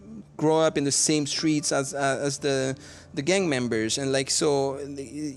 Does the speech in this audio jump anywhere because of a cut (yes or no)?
no